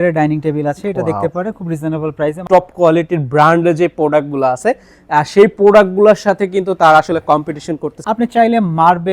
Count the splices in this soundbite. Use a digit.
2